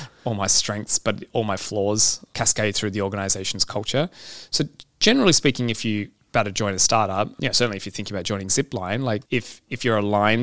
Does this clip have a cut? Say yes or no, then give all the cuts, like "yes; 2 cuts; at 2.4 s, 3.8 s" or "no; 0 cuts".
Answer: yes; 4 cuts; at 2.2 s, 6.2 s, 7.3 s, 9.2 s